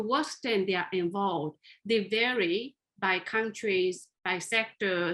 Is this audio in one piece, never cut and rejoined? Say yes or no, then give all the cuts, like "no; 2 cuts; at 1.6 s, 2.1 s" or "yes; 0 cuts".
yes; 0 cuts